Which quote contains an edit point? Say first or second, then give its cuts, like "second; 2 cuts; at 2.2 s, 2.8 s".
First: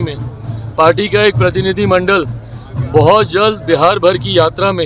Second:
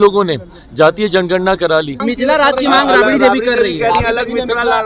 second; 1 cut; at 2.0 s